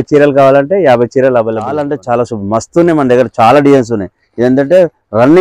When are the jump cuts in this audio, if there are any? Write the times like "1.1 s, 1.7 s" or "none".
1.9 s